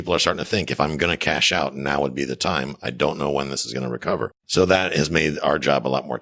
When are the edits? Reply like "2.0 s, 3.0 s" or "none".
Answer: 4.4 s